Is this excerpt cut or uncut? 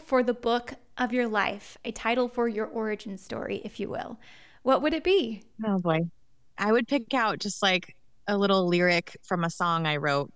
uncut